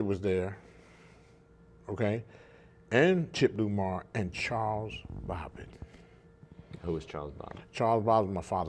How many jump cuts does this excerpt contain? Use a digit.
1